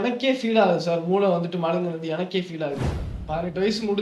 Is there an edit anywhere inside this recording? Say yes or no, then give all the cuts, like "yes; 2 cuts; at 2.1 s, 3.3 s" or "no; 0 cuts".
yes; 1 cut; at 3.1 s